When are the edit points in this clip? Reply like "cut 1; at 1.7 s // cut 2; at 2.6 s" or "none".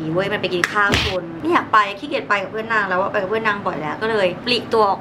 cut 1; at 1.4 s